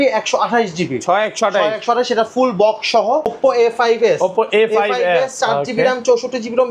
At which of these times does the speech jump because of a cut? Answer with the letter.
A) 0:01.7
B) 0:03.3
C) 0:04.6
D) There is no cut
B